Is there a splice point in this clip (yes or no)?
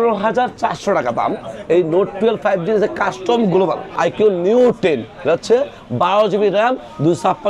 yes